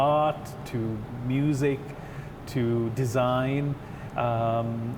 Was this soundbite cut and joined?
no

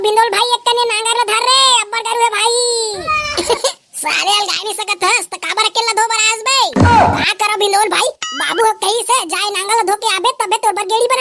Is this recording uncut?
yes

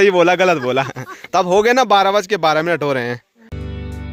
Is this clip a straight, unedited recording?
yes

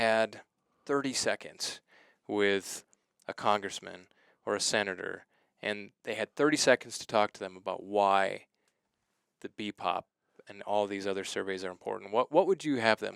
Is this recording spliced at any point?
no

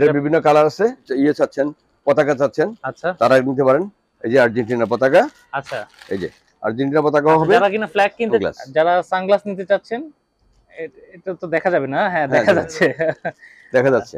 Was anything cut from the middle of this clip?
yes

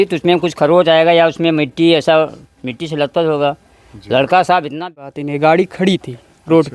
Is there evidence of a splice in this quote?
yes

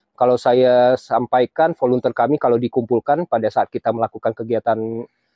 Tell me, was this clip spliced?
no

